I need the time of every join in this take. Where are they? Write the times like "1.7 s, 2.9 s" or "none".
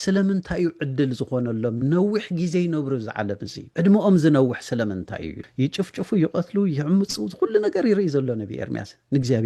3.5 s, 5.4 s